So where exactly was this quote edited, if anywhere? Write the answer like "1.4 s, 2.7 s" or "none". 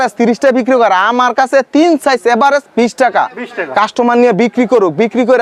none